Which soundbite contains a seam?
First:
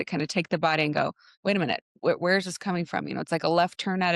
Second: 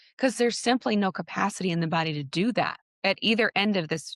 second; 1 cut; at 2.8 s

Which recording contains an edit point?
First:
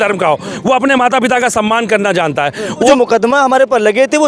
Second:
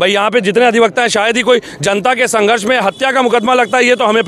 first; 1 cut; at 2.9 s

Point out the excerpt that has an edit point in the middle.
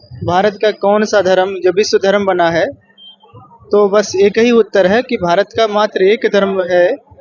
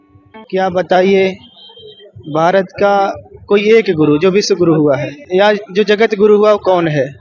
second; 1 cut; at 5.1 s

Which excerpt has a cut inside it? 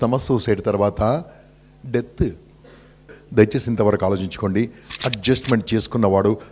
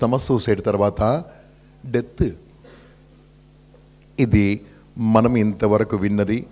first; 1 cut; at 3.2 s

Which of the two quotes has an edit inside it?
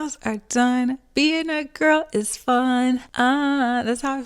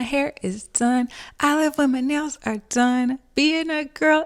first; 1 cut; at 3.1 s

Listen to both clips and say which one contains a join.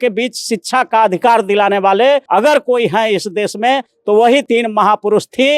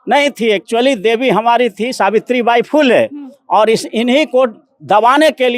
first; 2 cuts; at 2.2 s, 4.4 s

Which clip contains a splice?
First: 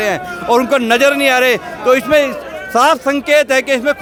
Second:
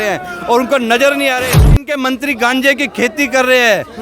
second; 1 cut; at 1.8 s

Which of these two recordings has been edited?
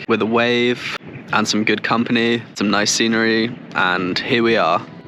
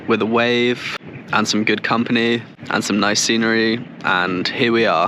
first; 1 cut; at 2.6 s

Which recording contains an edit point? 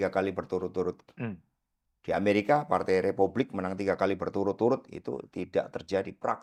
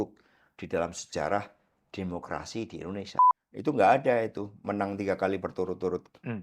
second; 1 cut; at 3.2 s

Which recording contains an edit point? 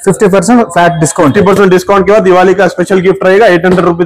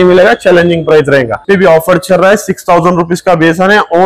second; 1 cut; at 1.4 s

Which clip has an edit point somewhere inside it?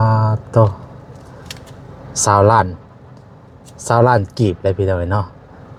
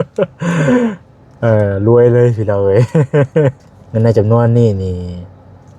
second; 1 cut; at 3.6 s

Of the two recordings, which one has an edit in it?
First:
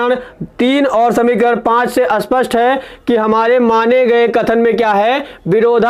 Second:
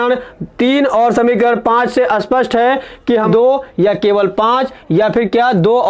second; 1 cut; at 3.3 s

